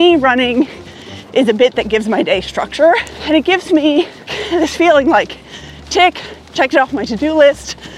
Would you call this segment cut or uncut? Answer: cut